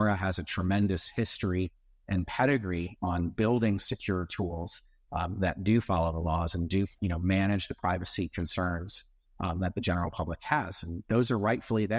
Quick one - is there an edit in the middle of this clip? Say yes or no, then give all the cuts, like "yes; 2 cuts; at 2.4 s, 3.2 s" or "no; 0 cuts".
no; 0 cuts